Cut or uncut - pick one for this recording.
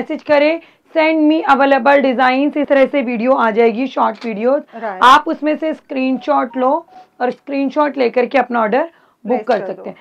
uncut